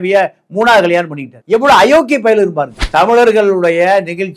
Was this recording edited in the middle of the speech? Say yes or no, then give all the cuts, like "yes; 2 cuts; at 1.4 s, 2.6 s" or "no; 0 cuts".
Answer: yes; 1 cut; at 2.7 s